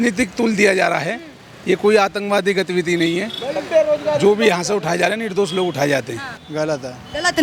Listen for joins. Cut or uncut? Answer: uncut